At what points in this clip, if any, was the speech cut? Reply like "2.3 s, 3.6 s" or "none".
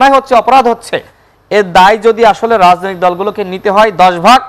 none

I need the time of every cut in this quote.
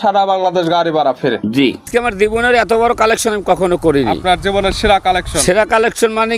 1.8 s

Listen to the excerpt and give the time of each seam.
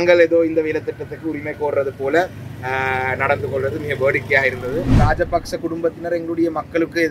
5.0 s

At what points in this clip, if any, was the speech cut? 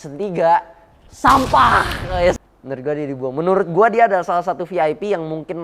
2.4 s

